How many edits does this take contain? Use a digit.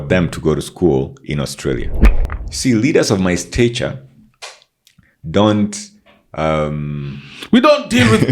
1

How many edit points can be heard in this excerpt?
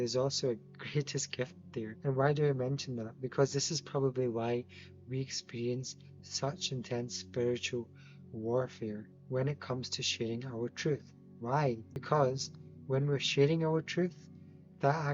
3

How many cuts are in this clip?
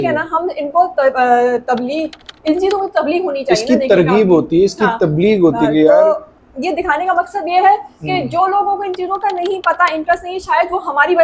0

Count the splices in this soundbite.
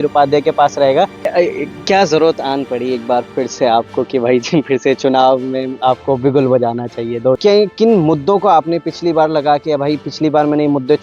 2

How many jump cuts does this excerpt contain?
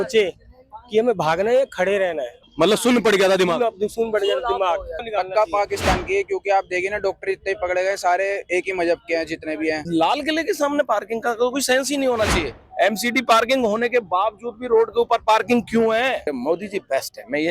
5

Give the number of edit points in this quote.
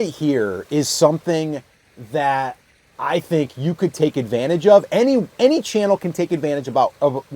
0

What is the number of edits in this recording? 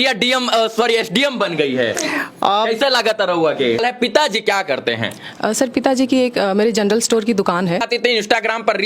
2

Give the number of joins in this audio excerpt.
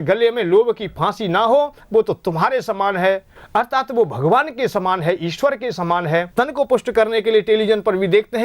1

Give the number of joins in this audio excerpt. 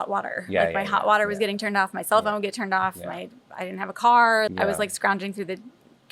1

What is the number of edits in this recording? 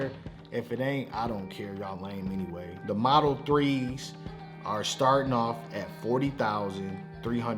1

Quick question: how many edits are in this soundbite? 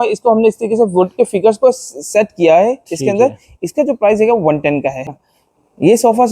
1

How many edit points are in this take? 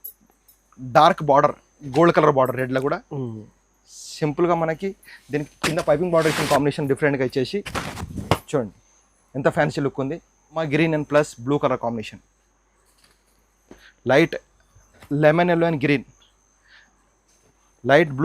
1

